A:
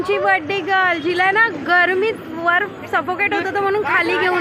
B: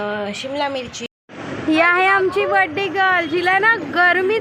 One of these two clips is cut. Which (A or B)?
B